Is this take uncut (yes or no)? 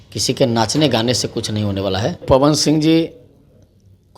no